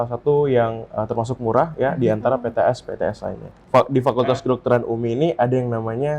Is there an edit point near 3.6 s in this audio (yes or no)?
yes